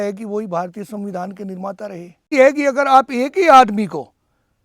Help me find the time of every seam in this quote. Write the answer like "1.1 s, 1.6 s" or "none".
2.3 s